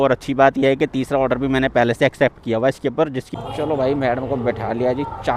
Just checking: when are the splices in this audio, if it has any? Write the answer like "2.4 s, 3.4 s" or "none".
3.2 s